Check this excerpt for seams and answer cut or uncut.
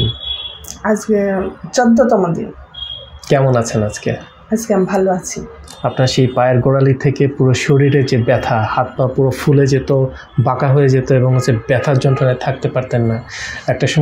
uncut